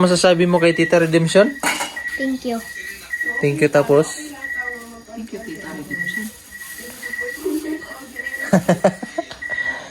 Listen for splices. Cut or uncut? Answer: uncut